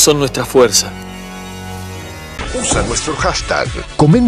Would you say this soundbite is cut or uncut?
uncut